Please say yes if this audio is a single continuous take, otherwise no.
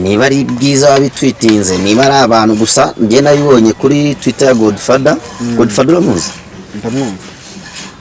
yes